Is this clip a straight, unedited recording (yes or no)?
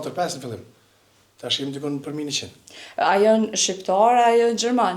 yes